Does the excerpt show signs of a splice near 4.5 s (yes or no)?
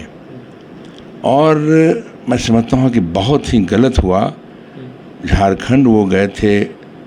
no